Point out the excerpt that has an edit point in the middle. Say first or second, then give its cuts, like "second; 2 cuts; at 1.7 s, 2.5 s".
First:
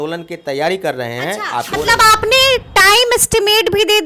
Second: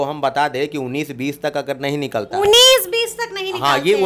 first; 1 cut; at 1.7 s